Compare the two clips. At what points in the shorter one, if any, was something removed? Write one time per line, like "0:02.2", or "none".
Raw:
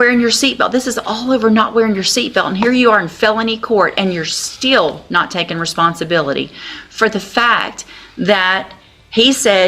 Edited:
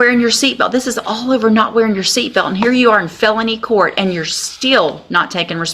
none